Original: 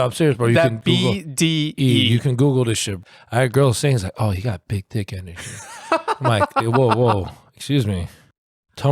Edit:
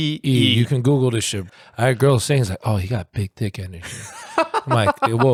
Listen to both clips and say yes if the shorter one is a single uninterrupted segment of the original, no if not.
yes